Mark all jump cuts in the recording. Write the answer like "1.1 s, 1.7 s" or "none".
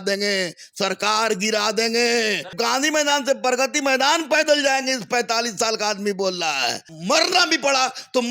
2.5 s, 6.9 s